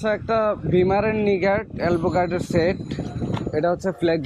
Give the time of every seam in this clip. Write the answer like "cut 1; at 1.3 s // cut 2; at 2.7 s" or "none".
none